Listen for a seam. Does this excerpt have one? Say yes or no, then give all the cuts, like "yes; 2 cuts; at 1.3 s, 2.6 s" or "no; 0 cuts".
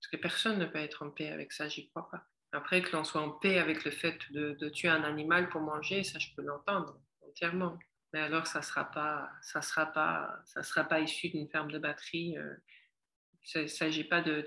yes; 2 cuts; at 2.3 s, 7.9 s